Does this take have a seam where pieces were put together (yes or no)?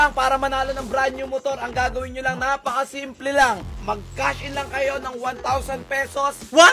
no